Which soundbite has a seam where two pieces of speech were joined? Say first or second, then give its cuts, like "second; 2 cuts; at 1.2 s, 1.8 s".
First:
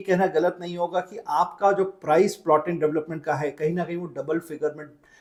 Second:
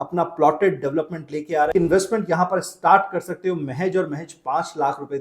second; 1 cut; at 1.7 s